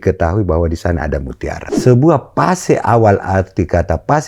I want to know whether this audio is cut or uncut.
cut